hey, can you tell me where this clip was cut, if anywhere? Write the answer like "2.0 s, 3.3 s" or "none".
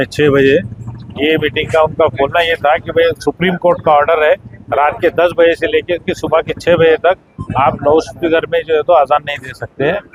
none